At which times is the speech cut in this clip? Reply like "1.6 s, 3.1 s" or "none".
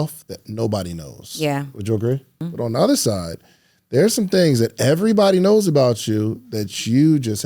2.5 s